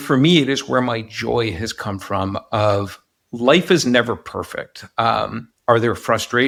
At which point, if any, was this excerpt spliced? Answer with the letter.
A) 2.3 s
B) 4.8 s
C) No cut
C